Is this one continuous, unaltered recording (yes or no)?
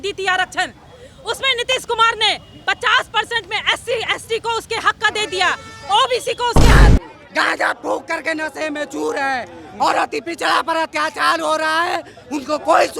no